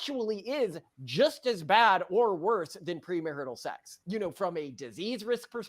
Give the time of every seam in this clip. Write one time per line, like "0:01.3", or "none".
0:03.9